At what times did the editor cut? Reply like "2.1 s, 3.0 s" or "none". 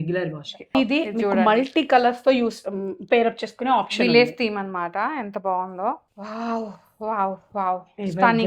0.8 s, 6.1 s